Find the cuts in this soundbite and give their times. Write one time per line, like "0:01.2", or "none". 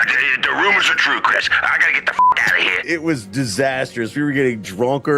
0:02.8